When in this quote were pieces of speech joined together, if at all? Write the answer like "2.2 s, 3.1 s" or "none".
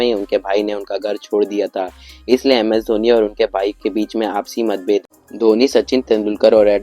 5.0 s